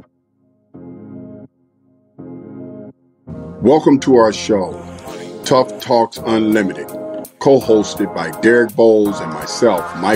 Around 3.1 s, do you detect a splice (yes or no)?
yes